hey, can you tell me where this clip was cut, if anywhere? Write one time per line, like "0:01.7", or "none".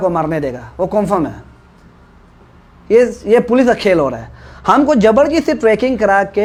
none